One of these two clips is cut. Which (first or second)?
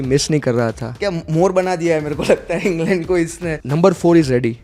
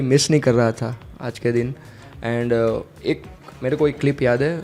first